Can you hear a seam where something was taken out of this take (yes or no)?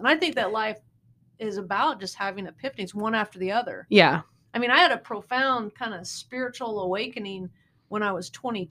no